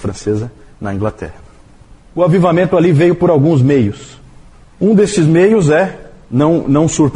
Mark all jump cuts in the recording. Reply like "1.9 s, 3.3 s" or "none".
4.9 s